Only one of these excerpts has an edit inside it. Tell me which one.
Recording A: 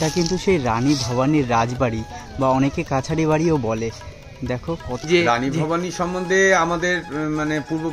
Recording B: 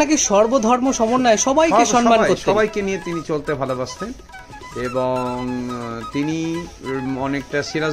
A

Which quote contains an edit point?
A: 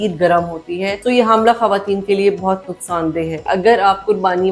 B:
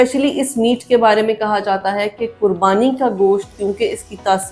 A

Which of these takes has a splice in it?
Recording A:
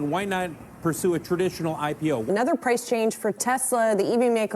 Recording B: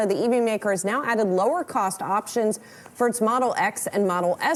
A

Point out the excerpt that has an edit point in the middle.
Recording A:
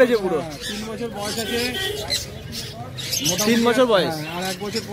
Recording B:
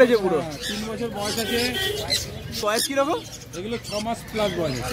B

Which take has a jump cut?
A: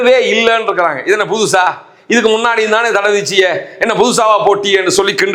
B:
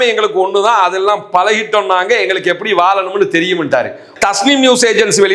B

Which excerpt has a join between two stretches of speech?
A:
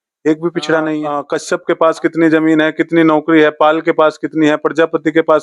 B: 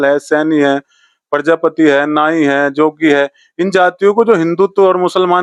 A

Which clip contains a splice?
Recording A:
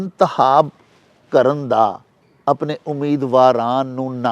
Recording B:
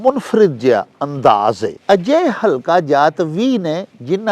B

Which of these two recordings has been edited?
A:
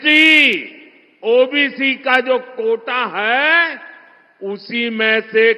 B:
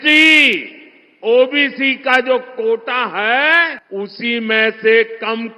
B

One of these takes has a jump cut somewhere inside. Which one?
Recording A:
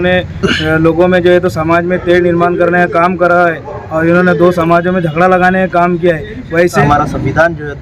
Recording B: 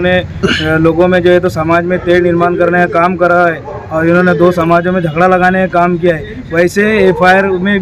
A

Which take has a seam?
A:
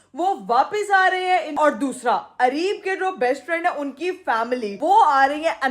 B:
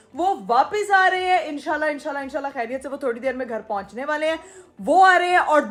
A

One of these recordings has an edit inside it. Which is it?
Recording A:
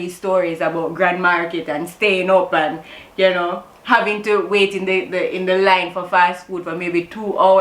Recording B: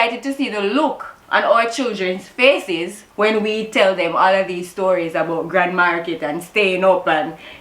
B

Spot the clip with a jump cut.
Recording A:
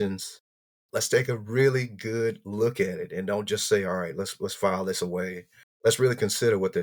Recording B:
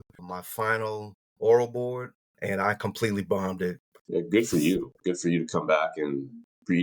B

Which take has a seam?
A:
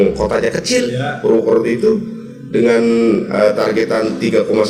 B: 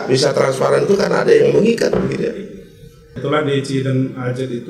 B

